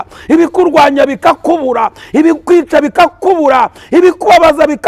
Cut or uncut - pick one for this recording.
uncut